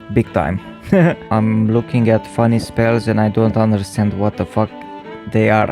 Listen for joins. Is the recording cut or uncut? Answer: cut